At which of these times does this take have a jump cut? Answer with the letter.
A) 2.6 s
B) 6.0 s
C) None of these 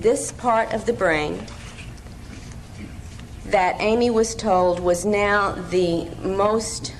A